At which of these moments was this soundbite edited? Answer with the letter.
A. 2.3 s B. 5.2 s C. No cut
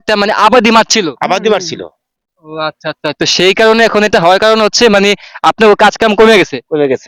C